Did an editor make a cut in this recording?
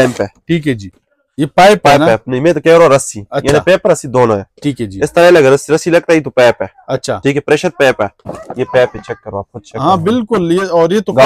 yes; 2 cuts; at 0.9 s, 8.3 s

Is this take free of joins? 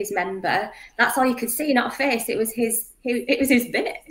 yes; 0 cuts

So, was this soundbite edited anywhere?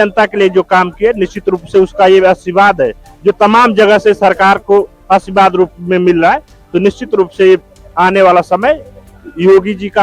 no; 0 cuts

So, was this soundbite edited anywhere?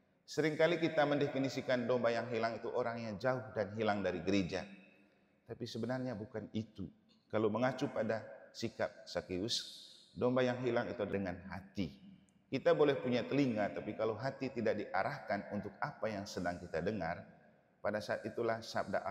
yes; 1 cut; at 11.1 s

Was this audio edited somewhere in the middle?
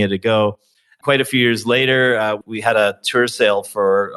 yes; 2 cuts; at 1.0 s, 2.5 s

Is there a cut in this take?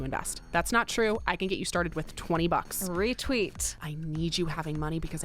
yes; 1 cut; at 3.8 s

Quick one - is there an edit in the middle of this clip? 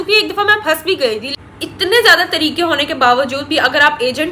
yes; 1 cut; at 1.3 s

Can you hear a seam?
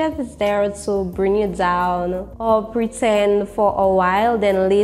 yes; 1 cut; at 2.3 s

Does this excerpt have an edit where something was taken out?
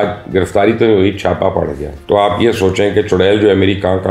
no; 0 cuts

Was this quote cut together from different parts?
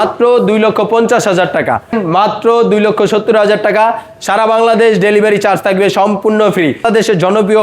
yes; 2 cuts; at 2.0 s, 6.8 s

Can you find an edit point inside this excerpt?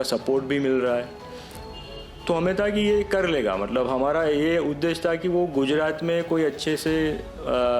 no; 0 cuts

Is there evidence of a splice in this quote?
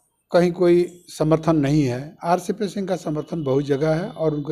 no; 0 cuts

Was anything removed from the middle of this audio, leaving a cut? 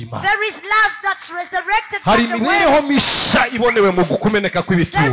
no; 0 cuts

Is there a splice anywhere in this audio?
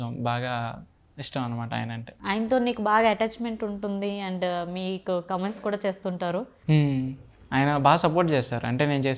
no; 0 cuts

